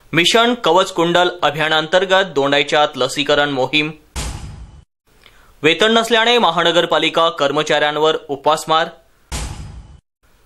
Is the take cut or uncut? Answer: uncut